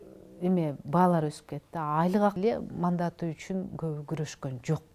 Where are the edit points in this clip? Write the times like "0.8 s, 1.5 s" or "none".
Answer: 2.4 s